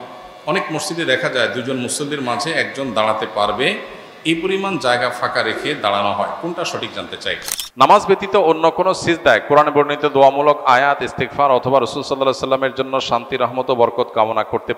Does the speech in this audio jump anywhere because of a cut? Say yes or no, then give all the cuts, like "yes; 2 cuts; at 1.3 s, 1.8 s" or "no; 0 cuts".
yes; 1 cut; at 7.6 s